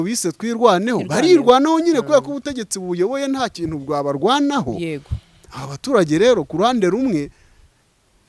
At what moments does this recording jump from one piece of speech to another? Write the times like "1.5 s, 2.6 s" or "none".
none